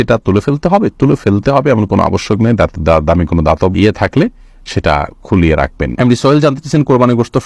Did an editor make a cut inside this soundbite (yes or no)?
no